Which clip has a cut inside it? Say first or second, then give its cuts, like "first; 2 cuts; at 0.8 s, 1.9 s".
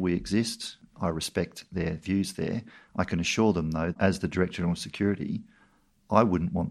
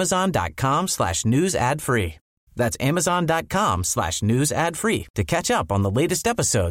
first; 3 cuts; at 0.8 s, 2.8 s, 4.0 s